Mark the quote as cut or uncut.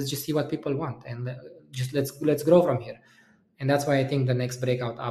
uncut